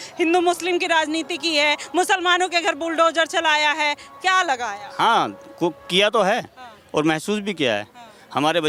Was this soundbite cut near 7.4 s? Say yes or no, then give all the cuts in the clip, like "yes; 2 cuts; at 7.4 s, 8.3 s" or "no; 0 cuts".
no; 0 cuts